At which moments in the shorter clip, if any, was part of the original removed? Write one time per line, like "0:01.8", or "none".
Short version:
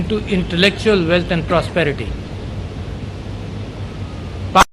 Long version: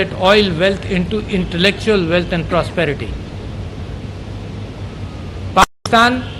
none